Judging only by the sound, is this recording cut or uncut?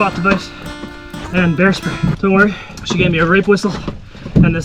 cut